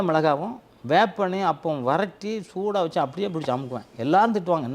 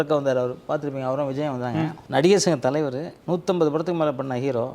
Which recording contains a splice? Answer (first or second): second